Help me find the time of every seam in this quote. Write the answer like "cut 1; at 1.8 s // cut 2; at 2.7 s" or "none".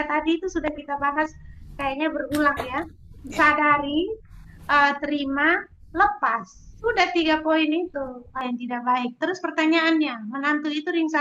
cut 1; at 8.4 s